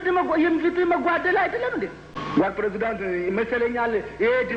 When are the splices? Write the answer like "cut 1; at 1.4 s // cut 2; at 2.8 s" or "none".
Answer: cut 1; at 2.1 s